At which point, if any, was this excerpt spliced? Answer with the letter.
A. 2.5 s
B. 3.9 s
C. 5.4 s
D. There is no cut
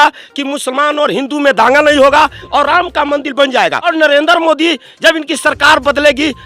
B